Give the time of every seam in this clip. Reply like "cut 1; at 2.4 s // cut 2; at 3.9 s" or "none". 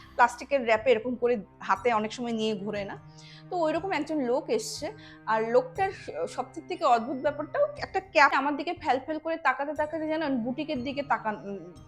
cut 1; at 8.3 s